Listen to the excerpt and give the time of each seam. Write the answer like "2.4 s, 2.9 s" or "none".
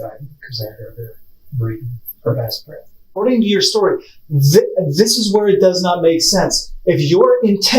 2.0 s, 3.1 s